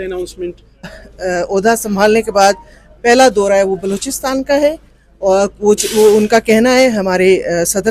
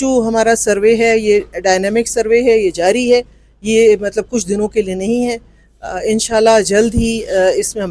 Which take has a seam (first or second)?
first